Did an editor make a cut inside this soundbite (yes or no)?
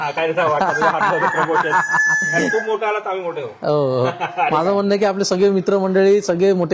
no